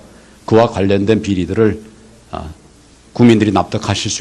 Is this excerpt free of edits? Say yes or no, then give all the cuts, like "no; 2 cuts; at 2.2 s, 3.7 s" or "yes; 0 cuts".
no; 1 cut; at 2.8 s